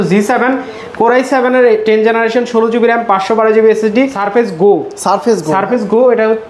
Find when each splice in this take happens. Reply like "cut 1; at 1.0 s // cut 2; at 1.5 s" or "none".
cut 1; at 4.1 s